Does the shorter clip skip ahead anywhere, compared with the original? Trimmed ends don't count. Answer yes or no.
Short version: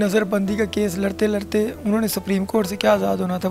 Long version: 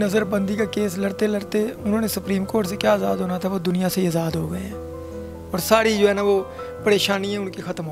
no